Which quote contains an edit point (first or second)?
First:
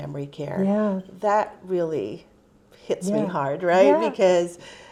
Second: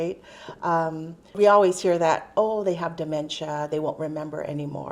second